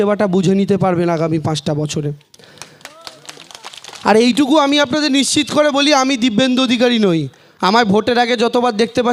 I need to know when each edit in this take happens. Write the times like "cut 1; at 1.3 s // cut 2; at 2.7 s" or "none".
none